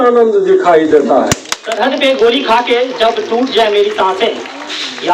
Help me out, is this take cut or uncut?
cut